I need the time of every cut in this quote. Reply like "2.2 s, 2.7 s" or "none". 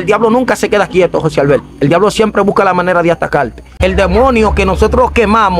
3.6 s